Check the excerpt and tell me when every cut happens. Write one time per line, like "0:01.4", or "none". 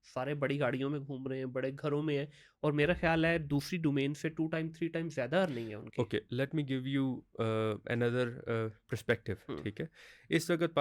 none